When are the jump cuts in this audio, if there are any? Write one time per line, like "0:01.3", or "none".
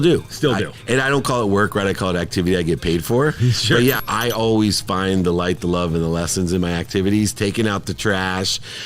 0:04.0